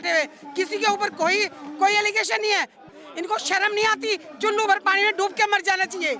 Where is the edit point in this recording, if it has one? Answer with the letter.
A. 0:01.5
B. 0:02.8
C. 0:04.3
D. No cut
B